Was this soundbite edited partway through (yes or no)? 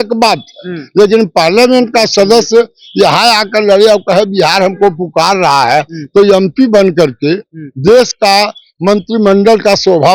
no